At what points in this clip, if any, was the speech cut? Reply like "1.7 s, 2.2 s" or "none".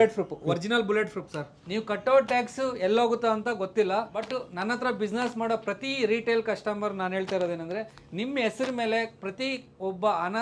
1.6 s, 4.3 s